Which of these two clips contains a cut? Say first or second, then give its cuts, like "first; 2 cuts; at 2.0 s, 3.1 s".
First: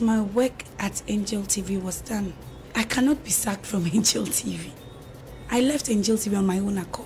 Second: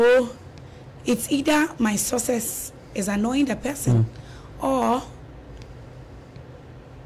first; 1 cut; at 2.6 s